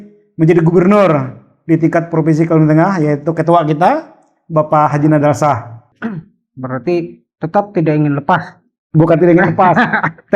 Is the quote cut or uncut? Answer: cut